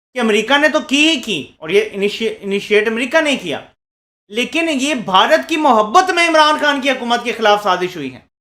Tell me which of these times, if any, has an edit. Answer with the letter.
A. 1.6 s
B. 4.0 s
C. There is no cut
C